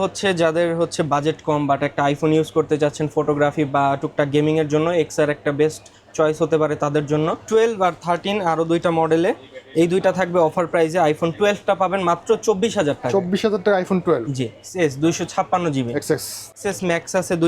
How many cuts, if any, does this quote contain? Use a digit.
3